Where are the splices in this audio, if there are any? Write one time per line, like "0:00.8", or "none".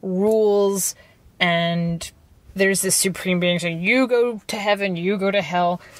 0:02.4